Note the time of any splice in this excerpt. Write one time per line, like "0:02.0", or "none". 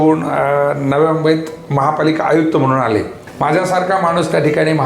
0:03.2